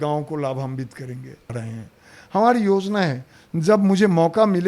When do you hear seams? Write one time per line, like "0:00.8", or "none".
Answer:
0:01.5